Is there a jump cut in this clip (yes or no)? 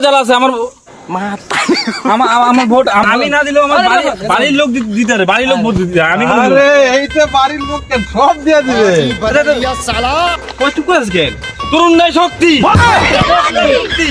yes